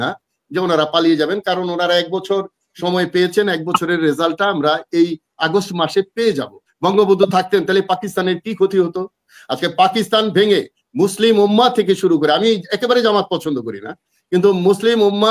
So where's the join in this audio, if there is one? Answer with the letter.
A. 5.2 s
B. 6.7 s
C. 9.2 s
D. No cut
B